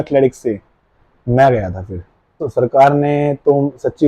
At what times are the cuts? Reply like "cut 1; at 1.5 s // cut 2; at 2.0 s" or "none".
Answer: cut 1; at 2.4 s